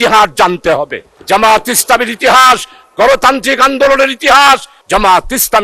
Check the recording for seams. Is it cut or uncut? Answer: cut